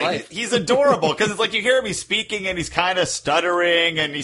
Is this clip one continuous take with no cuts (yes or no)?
yes